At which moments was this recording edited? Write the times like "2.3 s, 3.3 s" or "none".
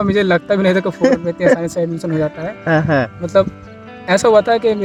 none